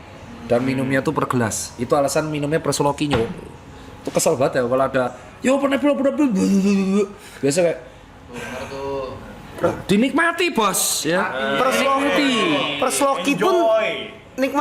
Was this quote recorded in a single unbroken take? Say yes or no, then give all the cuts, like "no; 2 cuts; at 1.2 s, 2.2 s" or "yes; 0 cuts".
yes; 0 cuts